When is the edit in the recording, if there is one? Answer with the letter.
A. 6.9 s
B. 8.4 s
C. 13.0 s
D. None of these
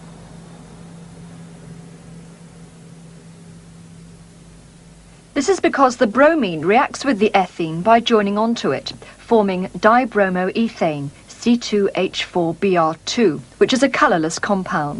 A